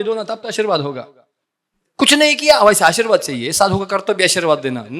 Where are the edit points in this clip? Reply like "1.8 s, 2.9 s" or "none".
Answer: none